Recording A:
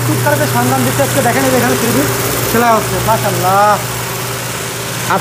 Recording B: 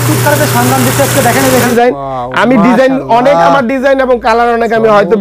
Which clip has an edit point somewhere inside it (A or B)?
B